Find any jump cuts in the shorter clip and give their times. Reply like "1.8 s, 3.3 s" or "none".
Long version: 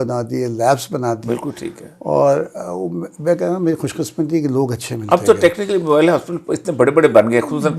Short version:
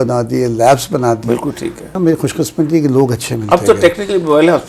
2.0 s